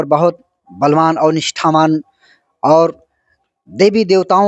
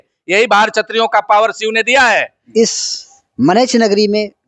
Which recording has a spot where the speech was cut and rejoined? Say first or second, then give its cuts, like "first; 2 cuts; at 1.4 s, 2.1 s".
second; 1 cut; at 2.4 s